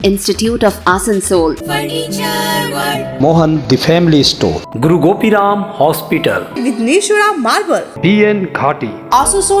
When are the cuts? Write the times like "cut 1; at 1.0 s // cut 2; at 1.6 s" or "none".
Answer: none